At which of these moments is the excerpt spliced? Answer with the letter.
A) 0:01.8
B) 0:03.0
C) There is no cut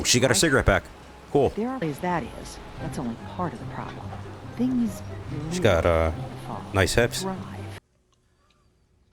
A